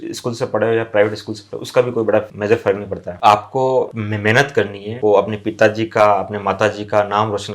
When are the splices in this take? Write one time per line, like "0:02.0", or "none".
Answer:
0:03.1